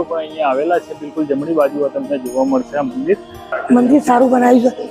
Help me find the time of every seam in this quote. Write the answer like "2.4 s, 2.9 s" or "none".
3.6 s